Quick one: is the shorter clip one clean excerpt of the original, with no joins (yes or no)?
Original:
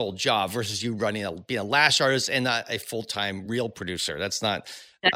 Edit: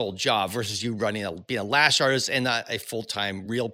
yes